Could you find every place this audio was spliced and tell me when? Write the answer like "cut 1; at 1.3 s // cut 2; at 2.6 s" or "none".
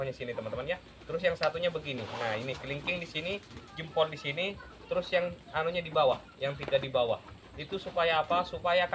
none